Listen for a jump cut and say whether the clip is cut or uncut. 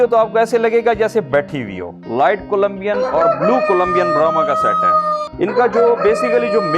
cut